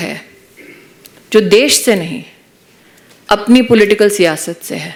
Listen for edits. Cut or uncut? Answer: uncut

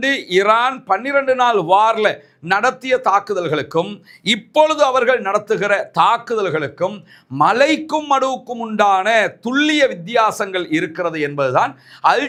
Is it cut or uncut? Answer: uncut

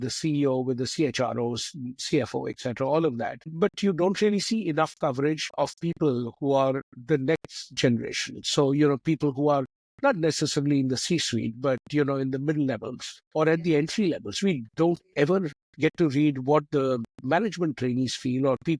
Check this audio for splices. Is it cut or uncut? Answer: uncut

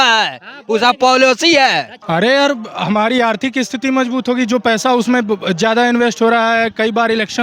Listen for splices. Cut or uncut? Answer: cut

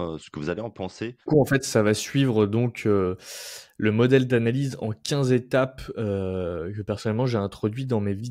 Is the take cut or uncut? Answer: cut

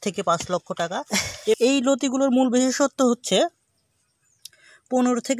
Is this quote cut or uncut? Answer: cut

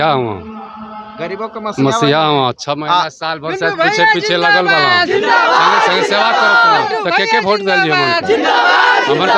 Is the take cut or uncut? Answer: uncut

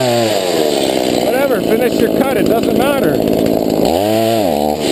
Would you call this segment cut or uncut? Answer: uncut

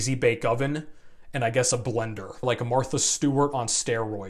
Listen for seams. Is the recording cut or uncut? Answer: cut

